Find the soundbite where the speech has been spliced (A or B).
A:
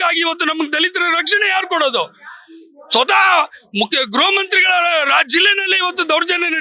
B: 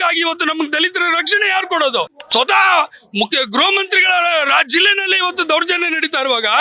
B